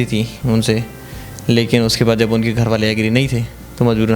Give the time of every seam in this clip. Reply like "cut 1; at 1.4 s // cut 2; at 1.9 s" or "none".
none